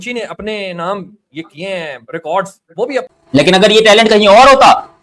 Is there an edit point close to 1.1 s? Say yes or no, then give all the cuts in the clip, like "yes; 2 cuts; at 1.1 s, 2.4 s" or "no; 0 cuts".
no; 1 cut; at 3.1 s